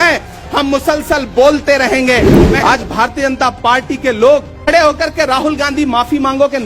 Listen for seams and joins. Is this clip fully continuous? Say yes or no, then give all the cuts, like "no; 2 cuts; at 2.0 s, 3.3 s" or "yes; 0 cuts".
no; 2 cuts; at 2.4 s, 4.6 s